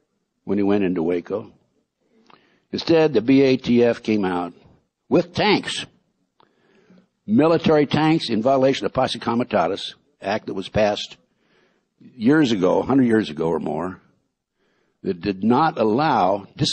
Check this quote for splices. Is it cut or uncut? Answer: cut